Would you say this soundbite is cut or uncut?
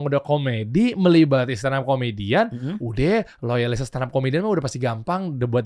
uncut